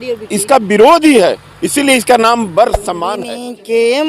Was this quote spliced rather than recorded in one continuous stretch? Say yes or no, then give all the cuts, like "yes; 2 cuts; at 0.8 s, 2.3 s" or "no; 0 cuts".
yes; 1 cut; at 3.1 s